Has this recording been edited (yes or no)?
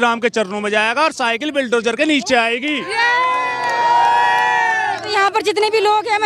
no